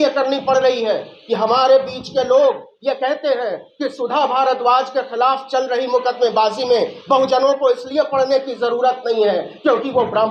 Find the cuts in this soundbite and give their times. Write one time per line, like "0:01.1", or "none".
none

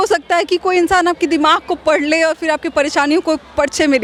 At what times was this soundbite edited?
none

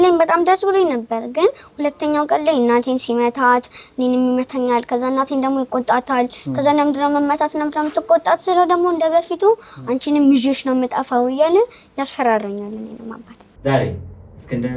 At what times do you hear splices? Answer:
0:13.6

